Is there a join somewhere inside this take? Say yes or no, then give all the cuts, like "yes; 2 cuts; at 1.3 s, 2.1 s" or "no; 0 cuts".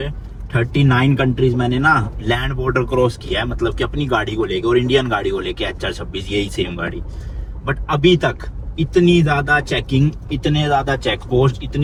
no; 0 cuts